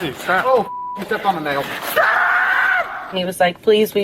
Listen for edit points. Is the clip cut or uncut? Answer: cut